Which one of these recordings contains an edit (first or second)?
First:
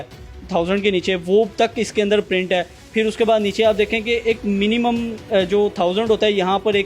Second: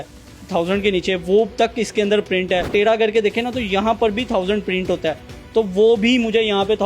second